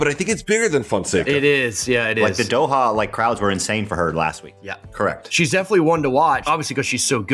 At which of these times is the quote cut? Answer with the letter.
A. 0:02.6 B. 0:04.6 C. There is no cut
B